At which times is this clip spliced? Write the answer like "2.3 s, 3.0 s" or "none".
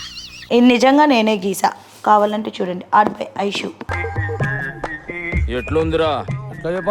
none